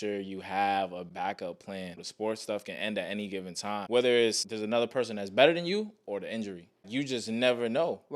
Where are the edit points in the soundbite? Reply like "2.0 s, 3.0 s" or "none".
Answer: 1.1 s, 2.0 s, 3.7 s, 4.5 s, 6.8 s